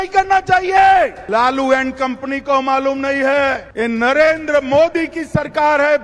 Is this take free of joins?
no; 2 cuts; at 1.2 s, 3.7 s

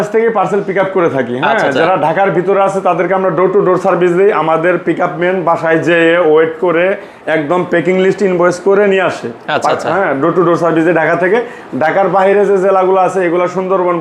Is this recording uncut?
yes; 0 cuts

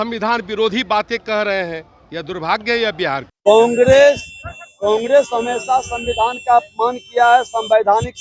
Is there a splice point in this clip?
yes; 1 cut; at 3.3 s

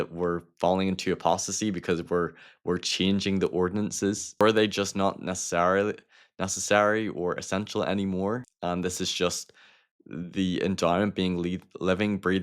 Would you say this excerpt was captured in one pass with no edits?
no; 2 cuts; at 4.4 s, 8.5 s

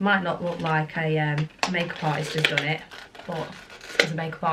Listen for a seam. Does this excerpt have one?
no; 0 cuts

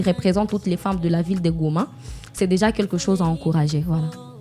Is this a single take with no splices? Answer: yes; 0 cuts

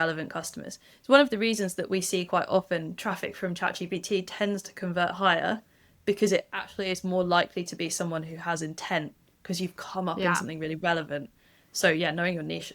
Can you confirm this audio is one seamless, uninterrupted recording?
yes; 0 cuts

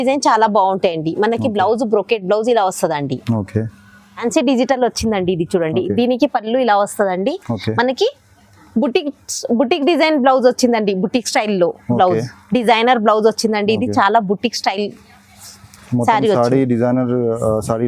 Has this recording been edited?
yes; 1 cut; at 4.2 s

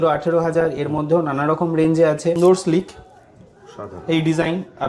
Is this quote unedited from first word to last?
no; 1 cut; at 2.4 s

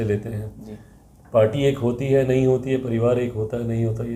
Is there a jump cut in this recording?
no; 0 cuts

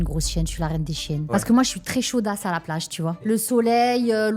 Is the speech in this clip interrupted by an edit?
yes; 2 cuts; at 1.3 s, 3.2 s

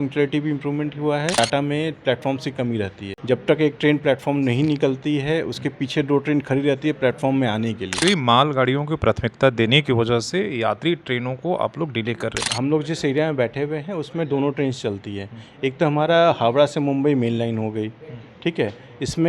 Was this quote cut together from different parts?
yes; 4 cuts; at 1.3 s, 3.1 s, 8.0 s, 12.4 s

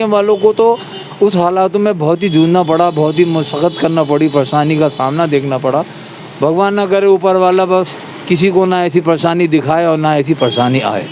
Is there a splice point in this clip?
no; 0 cuts

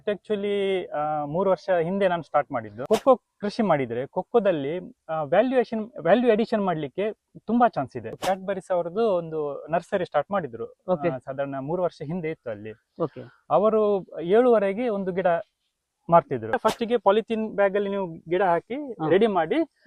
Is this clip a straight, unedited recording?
no; 3 cuts; at 2.8 s, 8.1 s, 16.6 s

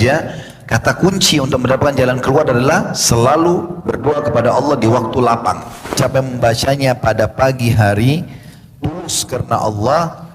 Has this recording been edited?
yes; 1 cut; at 5.9 s

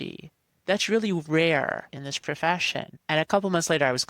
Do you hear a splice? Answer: yes; 2 cuts; at 2.0 s, 2.9 s

